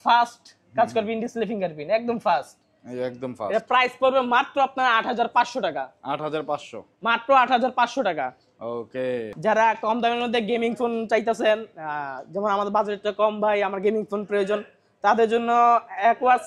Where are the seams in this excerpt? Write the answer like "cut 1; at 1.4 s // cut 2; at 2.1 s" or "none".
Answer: none